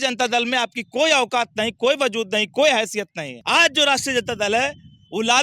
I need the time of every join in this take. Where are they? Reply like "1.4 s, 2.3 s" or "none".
3.3 s